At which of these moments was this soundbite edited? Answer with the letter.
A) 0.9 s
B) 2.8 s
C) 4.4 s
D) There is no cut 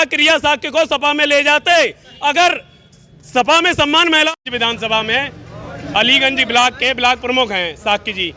C